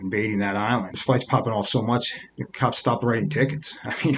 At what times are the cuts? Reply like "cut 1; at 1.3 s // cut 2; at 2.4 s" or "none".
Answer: cut 1; at 0.9 s